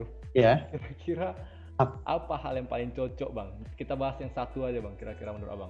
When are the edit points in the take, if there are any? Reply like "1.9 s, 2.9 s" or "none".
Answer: none